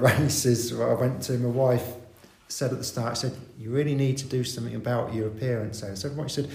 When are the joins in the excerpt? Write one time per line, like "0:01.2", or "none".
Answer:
none